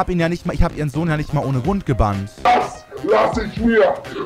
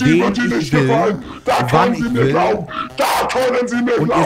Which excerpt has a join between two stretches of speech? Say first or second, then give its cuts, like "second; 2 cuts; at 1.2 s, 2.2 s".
first; 1 cut; at 2.5 s